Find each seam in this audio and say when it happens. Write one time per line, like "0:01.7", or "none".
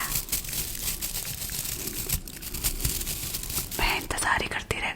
0:02.1